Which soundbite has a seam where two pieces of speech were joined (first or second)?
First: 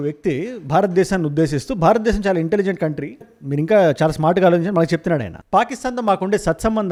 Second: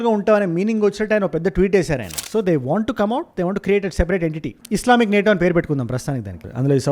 second